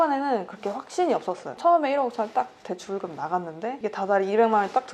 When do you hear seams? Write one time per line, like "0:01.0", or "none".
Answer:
0:01.5